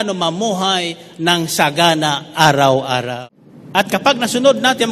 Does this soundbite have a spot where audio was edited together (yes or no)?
yes